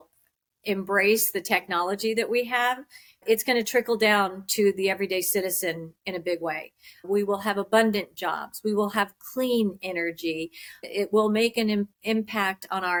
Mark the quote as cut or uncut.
uncut